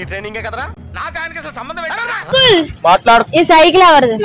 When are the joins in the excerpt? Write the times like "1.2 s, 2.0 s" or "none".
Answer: none

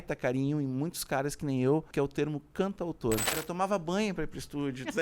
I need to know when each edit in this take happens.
1.9 s, 3.3 s

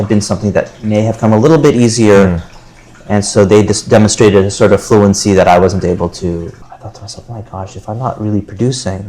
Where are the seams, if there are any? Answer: 6.6 s

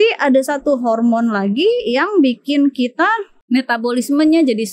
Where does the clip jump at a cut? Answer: 3.3 s

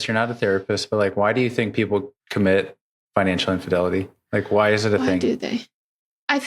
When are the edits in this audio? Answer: 2.2 s

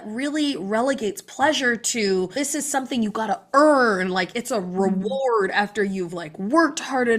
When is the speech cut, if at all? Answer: 2.3 s

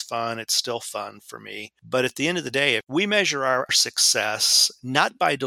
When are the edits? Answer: 1.7 s, 3.7 s

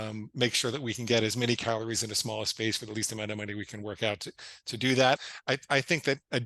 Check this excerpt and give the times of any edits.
5.2 s

